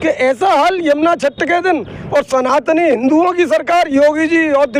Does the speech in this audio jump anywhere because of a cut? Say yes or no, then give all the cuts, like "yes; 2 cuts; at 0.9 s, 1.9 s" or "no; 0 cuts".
no; 0 cuts